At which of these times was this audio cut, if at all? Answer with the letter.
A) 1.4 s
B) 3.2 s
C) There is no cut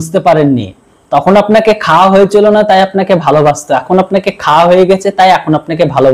C